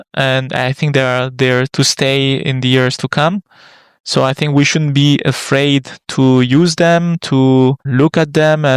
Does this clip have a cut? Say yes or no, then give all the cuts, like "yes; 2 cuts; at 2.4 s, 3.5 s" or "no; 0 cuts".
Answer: yes; 1 cut; at 7.8 s